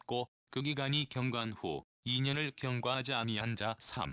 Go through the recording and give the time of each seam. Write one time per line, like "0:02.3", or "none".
0:03.2